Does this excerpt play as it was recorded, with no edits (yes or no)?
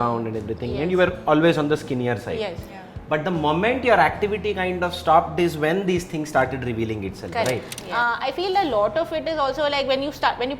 no